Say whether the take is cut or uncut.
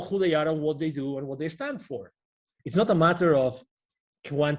cut